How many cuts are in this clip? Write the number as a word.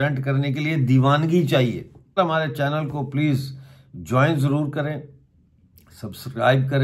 one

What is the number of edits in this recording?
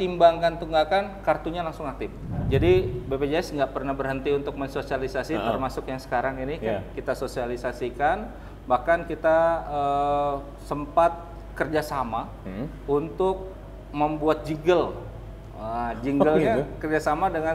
one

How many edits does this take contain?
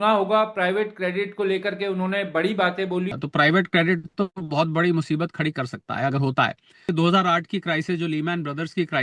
two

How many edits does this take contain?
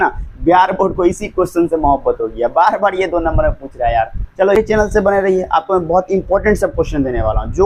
one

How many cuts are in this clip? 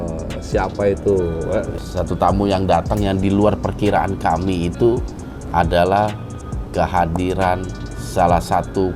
one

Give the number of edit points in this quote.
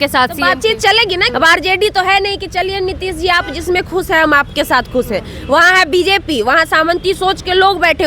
one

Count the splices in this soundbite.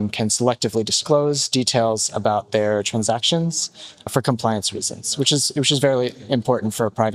one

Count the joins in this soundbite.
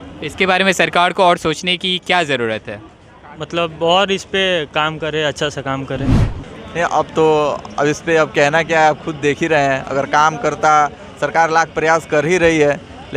one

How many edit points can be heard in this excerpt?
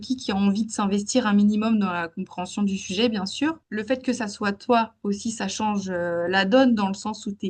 one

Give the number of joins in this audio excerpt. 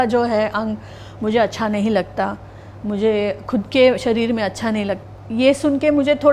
one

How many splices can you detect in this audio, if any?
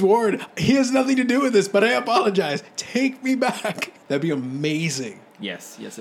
one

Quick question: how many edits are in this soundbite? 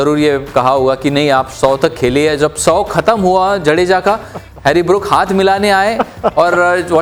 zero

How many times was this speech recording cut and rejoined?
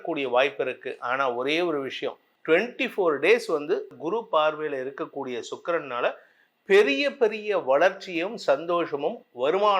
two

